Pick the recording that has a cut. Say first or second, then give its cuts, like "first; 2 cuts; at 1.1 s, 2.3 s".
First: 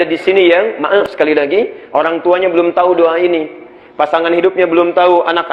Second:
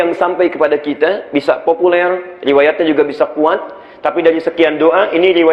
first; 1 cut; at 1.0 s